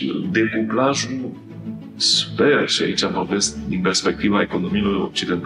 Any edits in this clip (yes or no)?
no